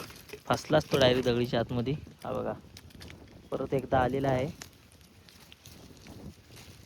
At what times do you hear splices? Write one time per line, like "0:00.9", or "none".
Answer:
none